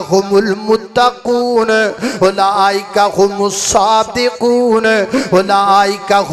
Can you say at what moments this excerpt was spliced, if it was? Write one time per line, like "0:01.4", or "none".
none

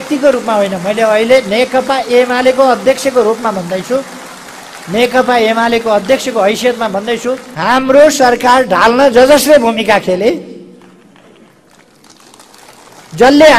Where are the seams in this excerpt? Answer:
0:07.5

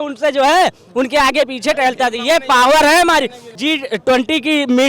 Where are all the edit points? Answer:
0:03.4

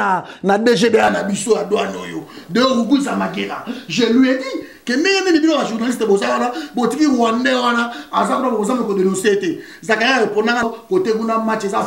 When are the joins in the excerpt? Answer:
0:10.6

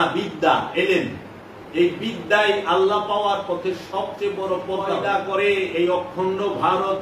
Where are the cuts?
0:05.0

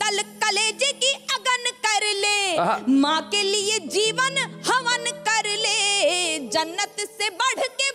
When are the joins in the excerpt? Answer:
none

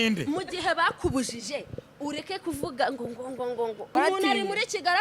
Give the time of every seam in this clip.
0:03.9

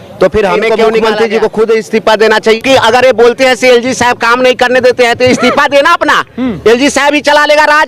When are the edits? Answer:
0:00.9
0:02.6

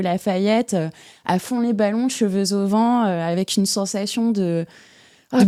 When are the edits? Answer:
none

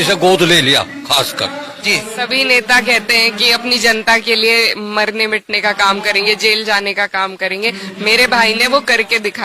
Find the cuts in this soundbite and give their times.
0:01.9

